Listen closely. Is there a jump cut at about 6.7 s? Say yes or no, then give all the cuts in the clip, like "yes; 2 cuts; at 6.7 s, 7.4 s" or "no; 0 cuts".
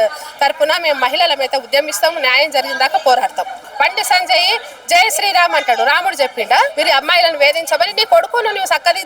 yes; 2 cuts; at 3.6 s, 6.7 s